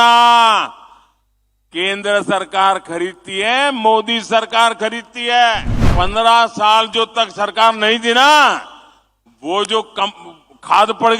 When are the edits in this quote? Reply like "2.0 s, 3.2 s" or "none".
5.7 s